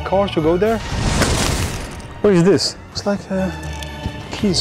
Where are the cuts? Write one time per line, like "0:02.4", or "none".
0:00.9
0:02.8